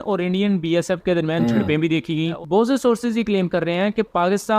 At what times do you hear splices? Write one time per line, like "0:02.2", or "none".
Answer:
0:02.3